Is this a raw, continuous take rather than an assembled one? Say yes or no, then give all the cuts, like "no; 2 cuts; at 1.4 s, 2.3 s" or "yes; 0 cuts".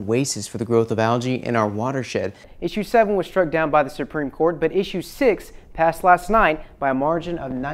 no; 1 cut; at 2.5 s